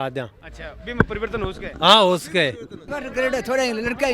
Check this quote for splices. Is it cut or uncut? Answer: cut